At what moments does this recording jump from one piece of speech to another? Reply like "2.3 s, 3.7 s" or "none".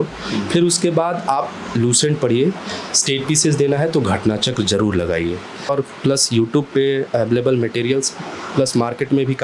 5.7 s